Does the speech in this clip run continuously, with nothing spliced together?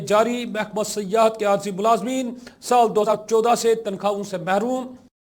no; 1 cut; at 3.1 s

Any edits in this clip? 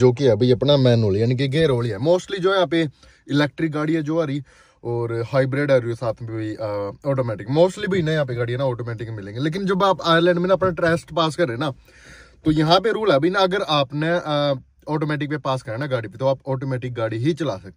no; 0 cuts

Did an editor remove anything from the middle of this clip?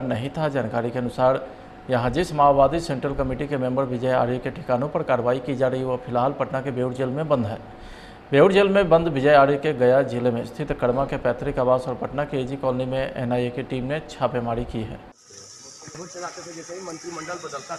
no; 0 cuts

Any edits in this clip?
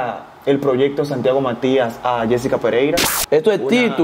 yes; 1 cut; at 3.1 s

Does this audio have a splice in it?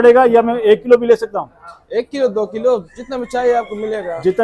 no; 0 cuts

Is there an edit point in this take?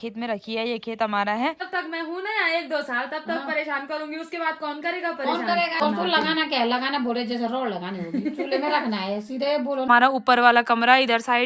yes; 3 cuts; at 1.6 s, 5.8 s, 9.9 s

